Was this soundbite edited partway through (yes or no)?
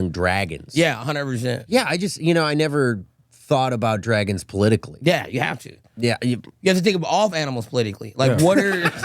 yes